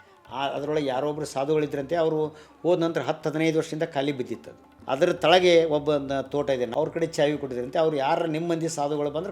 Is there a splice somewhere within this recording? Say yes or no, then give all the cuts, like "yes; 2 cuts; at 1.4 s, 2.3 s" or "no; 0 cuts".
yes; 2 cuts; at 4.7 s, 6.7 s